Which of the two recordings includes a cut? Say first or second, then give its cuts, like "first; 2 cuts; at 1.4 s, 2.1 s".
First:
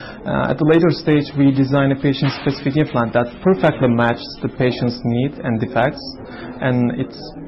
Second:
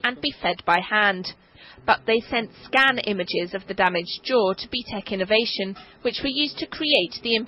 second; 1 cut; at 3.3 s